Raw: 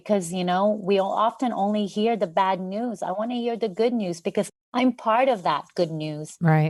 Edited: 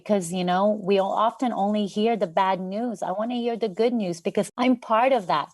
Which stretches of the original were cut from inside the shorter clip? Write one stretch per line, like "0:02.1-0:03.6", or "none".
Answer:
0:04.5-0:04.7